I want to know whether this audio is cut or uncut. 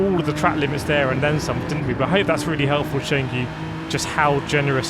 uncut